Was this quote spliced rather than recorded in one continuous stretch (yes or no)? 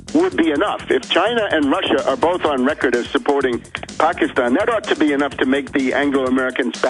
yes